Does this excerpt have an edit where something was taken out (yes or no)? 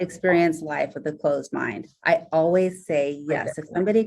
yes